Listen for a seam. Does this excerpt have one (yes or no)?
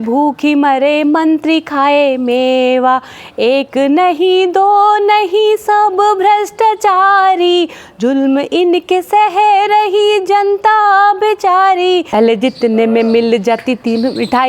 yes